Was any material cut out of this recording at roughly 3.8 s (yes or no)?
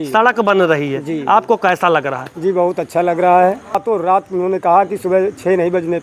yes